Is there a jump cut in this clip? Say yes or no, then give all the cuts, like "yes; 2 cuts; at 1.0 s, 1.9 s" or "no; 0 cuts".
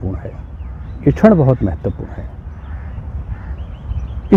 no; 0 cuts